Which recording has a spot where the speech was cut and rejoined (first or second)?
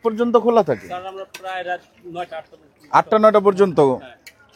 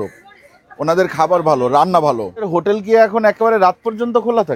second